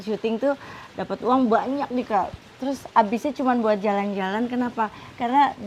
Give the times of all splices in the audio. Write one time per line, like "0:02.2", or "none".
none